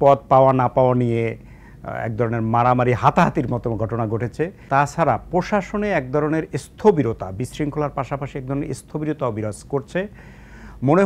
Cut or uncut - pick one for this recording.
cut